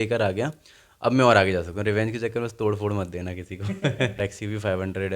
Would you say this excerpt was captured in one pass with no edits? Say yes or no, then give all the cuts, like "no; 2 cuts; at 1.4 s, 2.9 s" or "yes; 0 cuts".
no; 1 cut; at 4.2 s